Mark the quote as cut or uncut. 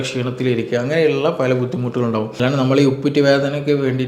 cut